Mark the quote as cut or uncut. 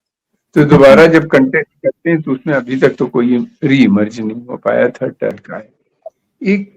cut